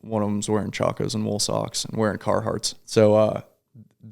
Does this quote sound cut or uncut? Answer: cut